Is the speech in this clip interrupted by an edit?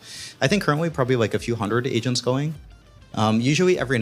no; 0 cuts

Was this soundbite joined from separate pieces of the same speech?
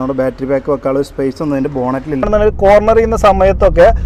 yes; 1 cut; at 2.2 s

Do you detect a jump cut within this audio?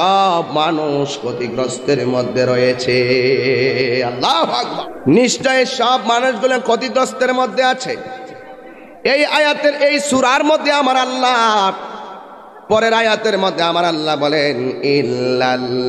yes; 1 cut; at 4.8 s

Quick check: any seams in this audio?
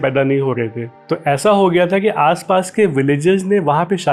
no; 0 cuts

